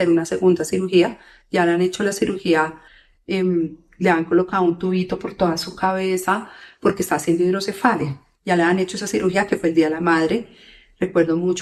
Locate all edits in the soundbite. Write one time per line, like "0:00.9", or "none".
none